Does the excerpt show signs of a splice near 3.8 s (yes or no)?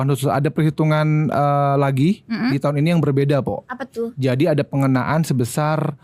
no